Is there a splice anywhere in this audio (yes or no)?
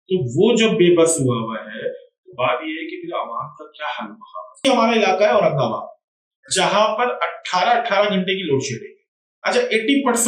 yes